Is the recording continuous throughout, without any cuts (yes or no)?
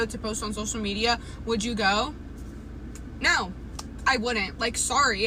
yes